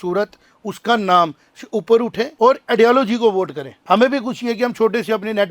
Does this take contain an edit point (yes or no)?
yes